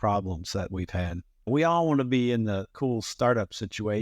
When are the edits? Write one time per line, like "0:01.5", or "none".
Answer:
0:01.5